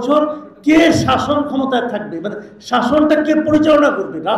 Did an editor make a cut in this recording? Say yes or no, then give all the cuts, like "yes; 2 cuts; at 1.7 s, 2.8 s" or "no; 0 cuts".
no; 0 cuts